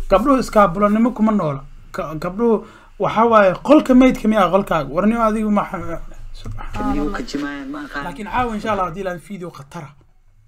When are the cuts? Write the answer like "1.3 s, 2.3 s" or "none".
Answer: 8.2 s